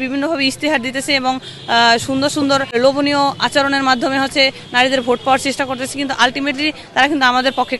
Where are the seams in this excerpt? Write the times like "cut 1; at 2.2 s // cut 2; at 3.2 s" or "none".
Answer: none